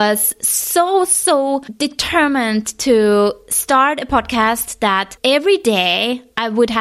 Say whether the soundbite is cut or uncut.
cut